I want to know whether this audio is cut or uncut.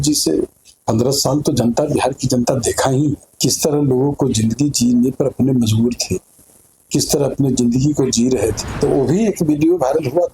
cut